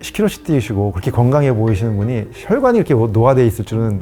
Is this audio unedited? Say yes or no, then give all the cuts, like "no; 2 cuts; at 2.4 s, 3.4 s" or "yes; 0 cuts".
yes; 0 cuts